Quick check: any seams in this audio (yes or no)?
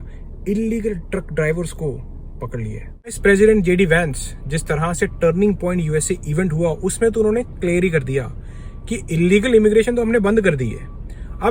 yes